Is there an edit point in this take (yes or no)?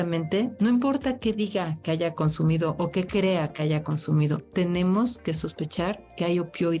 no